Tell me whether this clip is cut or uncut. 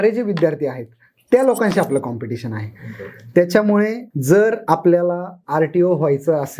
cut